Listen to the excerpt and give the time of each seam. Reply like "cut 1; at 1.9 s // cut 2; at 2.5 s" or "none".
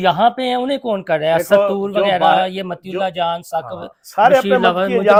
none